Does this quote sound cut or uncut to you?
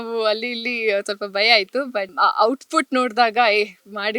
cut